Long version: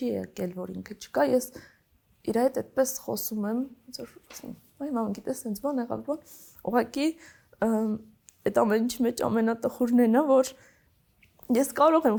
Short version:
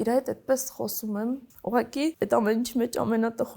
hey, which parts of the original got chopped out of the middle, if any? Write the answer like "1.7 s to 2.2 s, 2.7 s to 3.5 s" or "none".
3.8 s to 6.5 s, 7.2 s to 8.4 s